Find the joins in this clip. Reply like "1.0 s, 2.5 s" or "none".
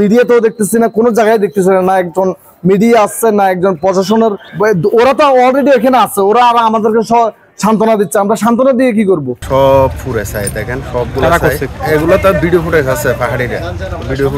4.5 s, 9.4 s, 11.8 s